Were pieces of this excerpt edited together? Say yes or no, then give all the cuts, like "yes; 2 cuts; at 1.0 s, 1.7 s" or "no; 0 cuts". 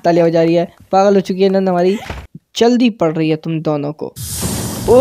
yes; 1 cut; at 2.2 s